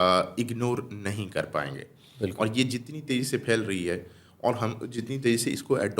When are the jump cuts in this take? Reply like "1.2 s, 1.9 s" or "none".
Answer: none